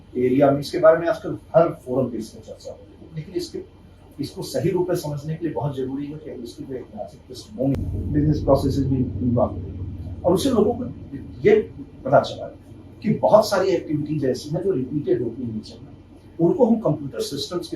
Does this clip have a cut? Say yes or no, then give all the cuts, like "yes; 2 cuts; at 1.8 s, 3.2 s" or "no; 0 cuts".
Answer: yes; 1 cut; at 7.8 s